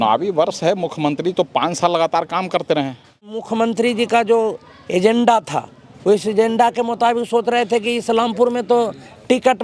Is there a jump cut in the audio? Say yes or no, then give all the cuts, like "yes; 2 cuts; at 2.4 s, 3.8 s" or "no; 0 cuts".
yes; 1 cut; at 3.2 s